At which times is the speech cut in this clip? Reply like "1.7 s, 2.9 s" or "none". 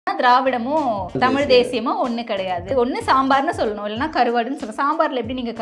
1.2 s, 2.7 s

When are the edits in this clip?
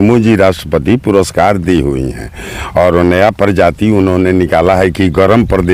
none

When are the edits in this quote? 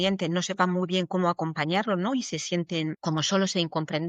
3.0 s

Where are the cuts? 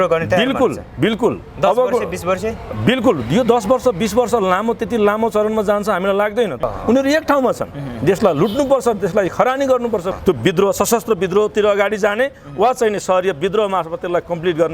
6.6 s, 10.1 s

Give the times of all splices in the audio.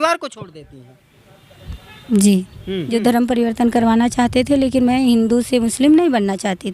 2.8 s

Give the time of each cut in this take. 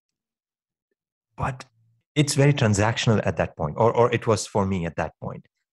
2.0 s

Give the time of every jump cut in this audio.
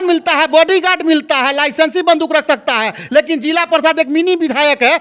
none

